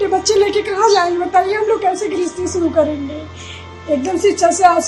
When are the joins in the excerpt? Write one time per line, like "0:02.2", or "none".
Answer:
none

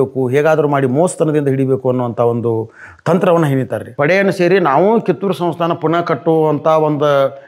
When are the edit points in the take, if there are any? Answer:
0:03.8

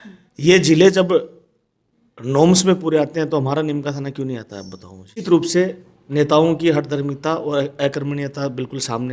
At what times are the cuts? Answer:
0:05.2

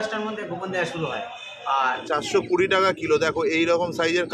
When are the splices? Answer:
0:02.0

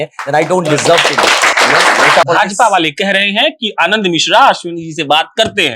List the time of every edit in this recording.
0:02.3

